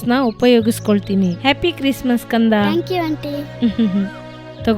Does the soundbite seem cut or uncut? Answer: cut